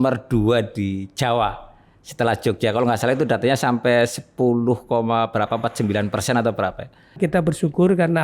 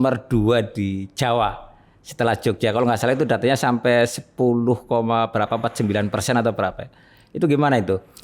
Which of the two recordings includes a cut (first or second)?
first